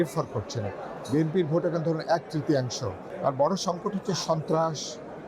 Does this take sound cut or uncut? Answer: cut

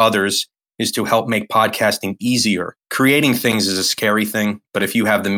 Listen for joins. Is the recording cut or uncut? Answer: uncut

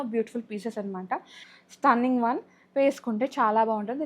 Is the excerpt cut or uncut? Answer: cut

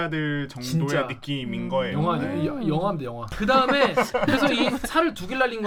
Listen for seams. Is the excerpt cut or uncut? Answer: uncut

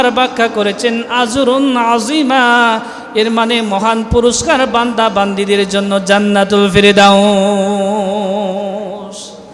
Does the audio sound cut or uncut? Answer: uncut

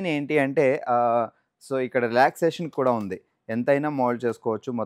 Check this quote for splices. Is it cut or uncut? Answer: uncut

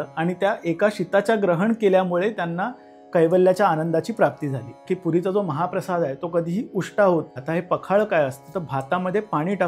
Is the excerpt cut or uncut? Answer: cut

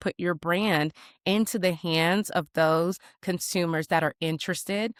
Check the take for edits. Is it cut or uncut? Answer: uncut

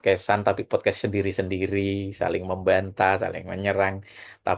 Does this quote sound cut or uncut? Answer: uncut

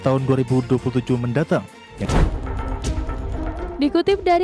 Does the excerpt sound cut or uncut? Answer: cut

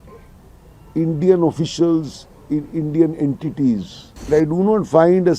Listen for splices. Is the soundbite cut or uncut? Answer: cut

